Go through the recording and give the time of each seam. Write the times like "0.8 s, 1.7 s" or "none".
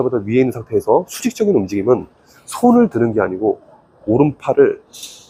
none